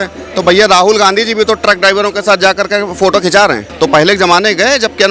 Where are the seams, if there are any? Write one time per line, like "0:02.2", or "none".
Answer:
0:03.6